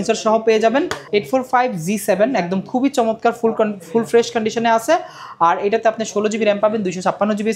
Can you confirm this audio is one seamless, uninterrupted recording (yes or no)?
no